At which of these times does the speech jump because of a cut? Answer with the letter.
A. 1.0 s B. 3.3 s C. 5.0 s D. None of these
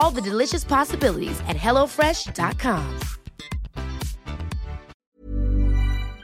C